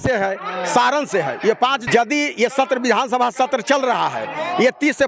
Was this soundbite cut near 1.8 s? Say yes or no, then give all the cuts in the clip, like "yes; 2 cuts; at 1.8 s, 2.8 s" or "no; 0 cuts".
yes; 1 cut; at 1.8 s